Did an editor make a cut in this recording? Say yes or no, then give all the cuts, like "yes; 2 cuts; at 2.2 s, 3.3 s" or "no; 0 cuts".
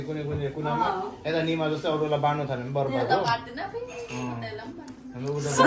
no; 0 cuts